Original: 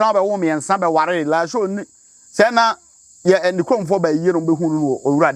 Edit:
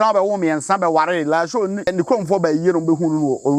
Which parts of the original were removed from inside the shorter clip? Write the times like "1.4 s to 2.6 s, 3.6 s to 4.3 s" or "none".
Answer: 1.9 s to 3.5 s